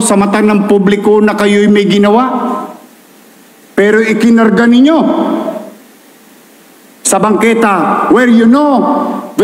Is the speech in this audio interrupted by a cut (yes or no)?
no